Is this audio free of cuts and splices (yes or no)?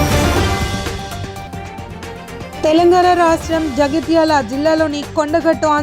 no